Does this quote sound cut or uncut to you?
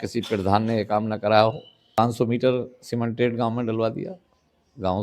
cut